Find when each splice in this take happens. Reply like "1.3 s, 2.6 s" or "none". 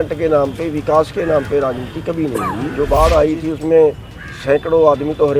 2.7 s